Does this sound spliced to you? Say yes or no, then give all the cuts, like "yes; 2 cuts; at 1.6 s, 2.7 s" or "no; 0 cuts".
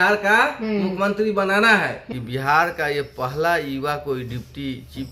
yes; 1 cut; at 2.1 s